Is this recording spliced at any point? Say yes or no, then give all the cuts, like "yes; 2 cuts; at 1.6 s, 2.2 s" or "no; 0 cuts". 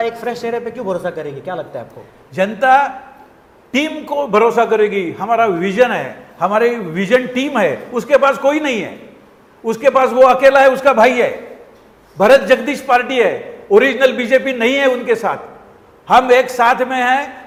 no; 0 cuts